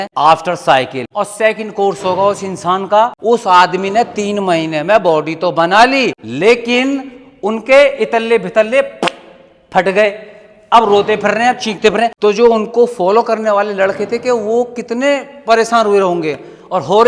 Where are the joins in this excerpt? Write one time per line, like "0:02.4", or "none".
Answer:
0:01.0
0:03.2
0:06.2
0:12.1